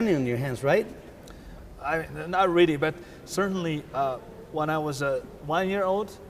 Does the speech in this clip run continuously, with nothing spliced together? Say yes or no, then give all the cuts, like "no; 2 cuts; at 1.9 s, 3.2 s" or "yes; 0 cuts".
yes; 0 cuts